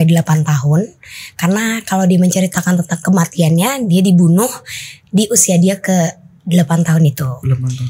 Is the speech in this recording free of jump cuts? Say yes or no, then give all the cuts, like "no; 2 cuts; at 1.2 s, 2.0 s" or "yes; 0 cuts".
yes; 0 cuts